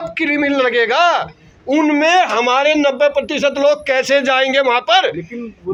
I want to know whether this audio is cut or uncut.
uncut